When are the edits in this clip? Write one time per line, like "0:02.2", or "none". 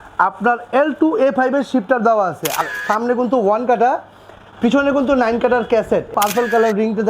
0:02.7
0:06.1